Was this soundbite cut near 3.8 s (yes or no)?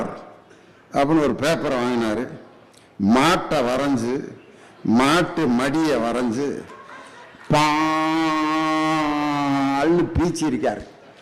no